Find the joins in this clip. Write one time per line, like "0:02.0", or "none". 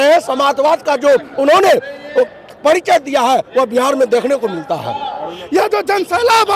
0:05.4